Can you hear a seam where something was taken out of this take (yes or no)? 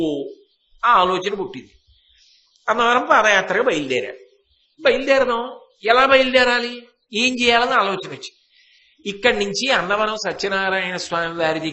no